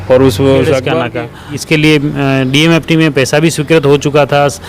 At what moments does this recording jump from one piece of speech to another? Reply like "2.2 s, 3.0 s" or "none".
1.1 s

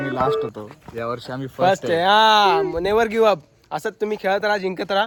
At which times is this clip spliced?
none

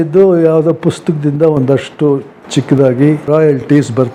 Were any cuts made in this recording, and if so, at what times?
none

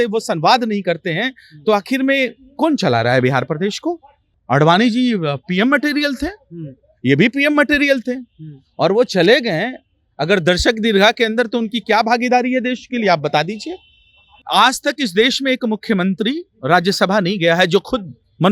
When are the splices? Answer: 4.3 s, 14.4 s

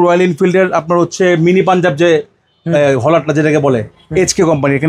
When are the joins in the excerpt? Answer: none

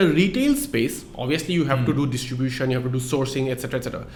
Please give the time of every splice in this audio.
none

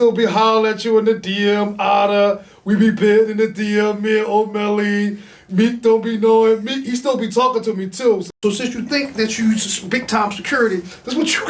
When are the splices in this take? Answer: 8.3 s

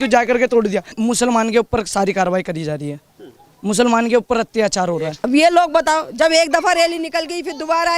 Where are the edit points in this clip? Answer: 0.9 s, 5.1 s

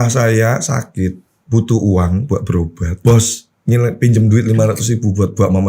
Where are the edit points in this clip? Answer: 1.3 s, 2.9 s

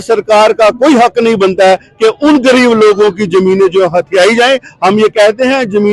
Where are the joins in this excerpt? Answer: none

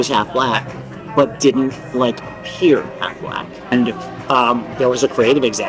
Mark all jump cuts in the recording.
3.7 s

